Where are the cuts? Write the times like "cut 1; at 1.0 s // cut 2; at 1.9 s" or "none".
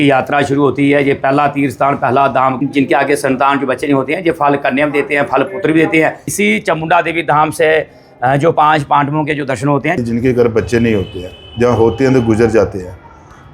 cut 1; at 2.6 s // cut 2; at 6.2 s // cut 3; at 10.0 s